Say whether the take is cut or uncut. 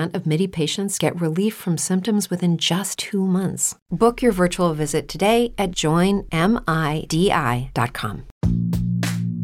cut